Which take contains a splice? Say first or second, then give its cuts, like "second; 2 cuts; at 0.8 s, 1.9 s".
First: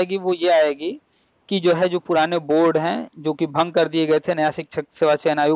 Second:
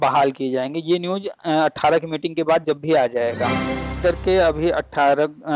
second; 1 cut; at 4.0 s